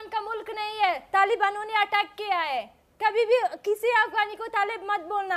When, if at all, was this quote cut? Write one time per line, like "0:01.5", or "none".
none

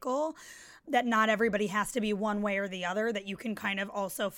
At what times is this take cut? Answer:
none

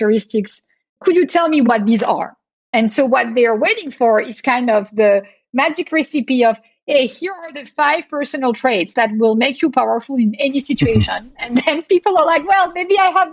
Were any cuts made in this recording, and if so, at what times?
0:01.0

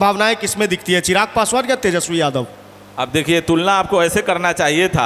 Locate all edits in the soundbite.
none

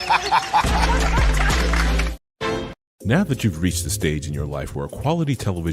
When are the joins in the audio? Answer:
0:02.7

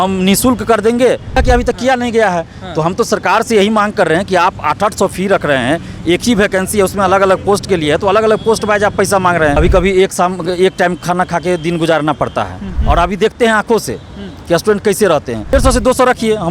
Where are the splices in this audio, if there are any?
0:01.4
0:09.6
0:12.7
0:15.5

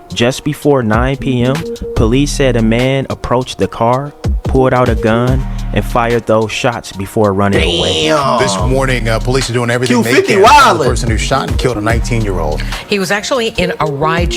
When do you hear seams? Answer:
none

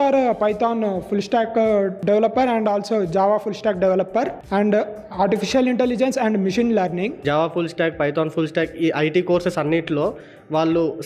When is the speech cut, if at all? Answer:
0:02.0
0:04.4
0:07.1

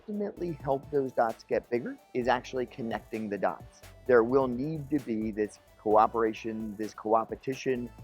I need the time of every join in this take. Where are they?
0:02.0
0:03.7

